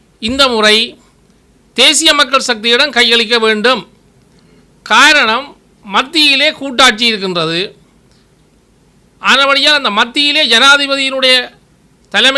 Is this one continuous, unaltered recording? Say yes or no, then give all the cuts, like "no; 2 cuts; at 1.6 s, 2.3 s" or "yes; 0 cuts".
yes; 0 cuts